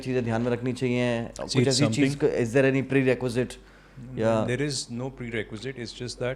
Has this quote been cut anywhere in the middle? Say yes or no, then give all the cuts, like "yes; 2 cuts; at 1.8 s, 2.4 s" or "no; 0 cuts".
no; 0 cuts